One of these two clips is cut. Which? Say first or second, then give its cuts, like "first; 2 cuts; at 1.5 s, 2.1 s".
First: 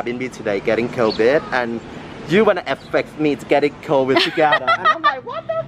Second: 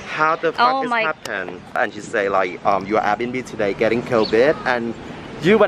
second; 1 cut; at 1.8 s